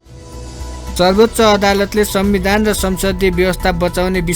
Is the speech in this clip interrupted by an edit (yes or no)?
yes